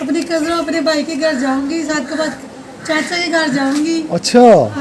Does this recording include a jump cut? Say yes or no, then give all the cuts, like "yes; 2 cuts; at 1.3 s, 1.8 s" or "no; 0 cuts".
no; 0 cuts